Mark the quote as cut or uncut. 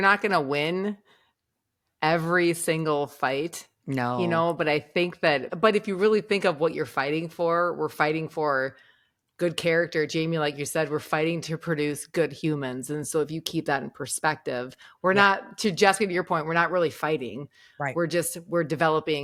uncut